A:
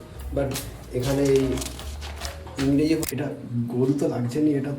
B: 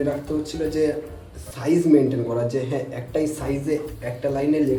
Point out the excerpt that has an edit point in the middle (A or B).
A